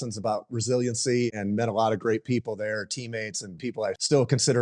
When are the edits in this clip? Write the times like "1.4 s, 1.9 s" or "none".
1.3 s, 3.6 s